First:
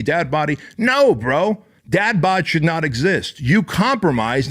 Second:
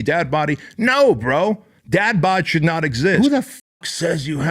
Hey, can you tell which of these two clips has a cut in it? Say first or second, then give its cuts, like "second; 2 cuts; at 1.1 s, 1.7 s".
second; 1 cut; at 3.2 s